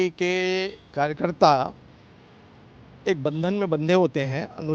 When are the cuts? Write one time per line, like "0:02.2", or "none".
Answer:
none